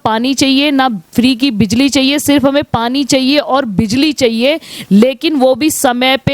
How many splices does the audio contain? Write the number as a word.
zero